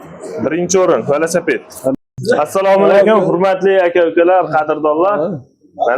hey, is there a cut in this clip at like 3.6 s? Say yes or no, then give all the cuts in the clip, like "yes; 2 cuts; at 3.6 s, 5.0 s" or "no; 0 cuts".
no; 1 cut; at 1.9 s